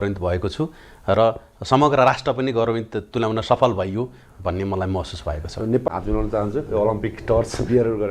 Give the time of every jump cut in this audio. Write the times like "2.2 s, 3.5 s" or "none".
5.8 s